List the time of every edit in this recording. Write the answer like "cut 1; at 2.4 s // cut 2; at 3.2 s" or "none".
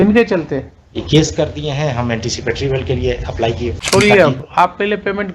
cut 1; at 3.7 s